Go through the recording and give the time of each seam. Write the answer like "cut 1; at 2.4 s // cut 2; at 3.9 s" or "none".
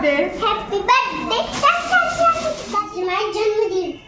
cut 1; at 3.0 s